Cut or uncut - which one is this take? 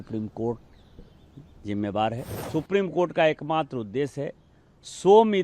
cut